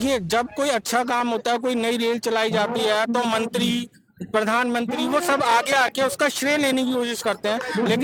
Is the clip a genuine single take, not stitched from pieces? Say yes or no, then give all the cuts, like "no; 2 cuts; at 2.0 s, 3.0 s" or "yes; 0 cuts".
yes; 0 cuts